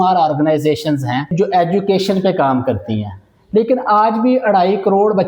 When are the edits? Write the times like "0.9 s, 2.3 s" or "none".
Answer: 1.3 s